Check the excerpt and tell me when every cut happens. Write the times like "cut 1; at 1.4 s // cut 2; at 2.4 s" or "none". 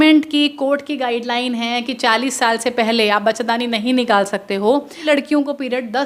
cut 1; at 5.1 s